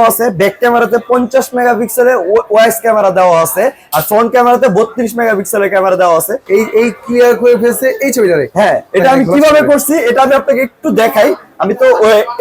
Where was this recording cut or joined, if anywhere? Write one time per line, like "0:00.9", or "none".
0:06.4